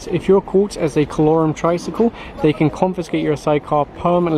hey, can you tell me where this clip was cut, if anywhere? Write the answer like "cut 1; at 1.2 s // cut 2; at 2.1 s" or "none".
none